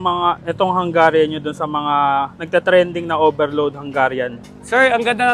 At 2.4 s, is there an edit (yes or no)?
no